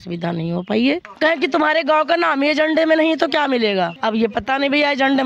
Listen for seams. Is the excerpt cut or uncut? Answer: cut